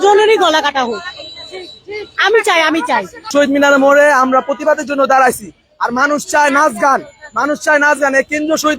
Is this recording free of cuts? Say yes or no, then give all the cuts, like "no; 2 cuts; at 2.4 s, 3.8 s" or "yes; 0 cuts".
no; 1 cut; at 3.2 s